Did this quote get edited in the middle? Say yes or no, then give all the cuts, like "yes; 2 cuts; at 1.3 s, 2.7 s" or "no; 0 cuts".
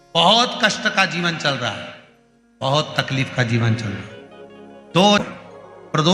yes; 1 cut; at 5.2 s